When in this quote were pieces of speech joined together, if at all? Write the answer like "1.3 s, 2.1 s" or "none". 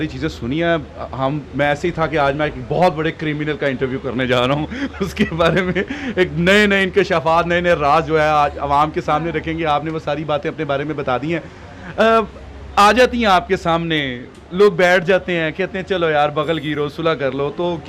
none